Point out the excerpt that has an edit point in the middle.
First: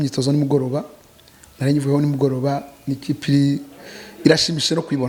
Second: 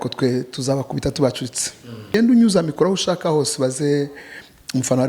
second; 1 cut; at 2.1 s

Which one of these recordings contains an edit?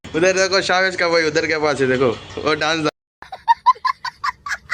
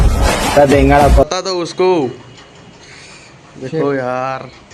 second; 1 cut; at 1.3 s

